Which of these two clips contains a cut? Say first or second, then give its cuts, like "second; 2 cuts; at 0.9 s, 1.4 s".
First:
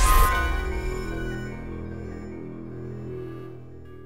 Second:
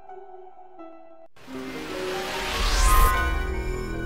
second; 1 cut; at 1.3 s